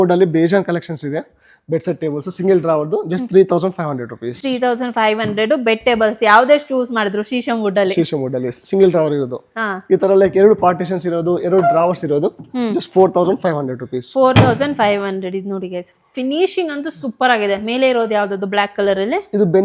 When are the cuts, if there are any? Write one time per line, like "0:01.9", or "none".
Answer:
none